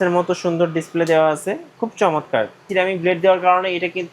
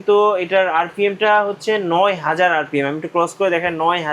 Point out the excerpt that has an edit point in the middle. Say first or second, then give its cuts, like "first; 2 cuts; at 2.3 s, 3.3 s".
first; 1 cut; at 2.7 s